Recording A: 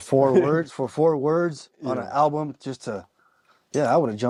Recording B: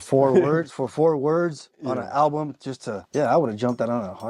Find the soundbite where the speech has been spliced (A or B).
B